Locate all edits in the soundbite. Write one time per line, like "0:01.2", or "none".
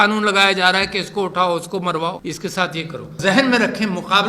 0:02.2
0:03.2